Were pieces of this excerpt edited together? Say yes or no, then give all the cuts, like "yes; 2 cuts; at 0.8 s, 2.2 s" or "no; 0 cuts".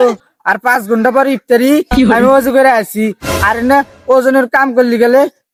no; 0 cuts